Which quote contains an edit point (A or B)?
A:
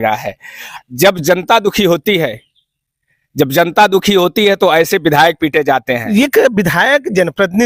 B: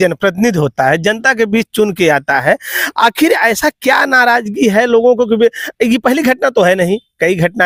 A